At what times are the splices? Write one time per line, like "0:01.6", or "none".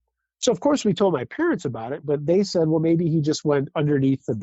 0:02.0